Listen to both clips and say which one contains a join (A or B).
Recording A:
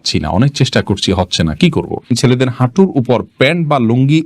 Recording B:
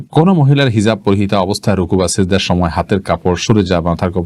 A